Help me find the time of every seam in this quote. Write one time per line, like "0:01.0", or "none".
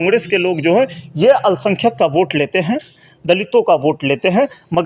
none

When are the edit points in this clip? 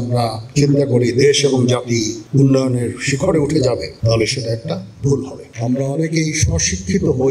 0:02.2
0:05.4

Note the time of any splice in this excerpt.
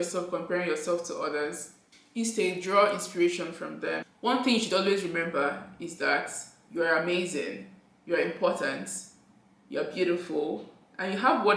0:04.1

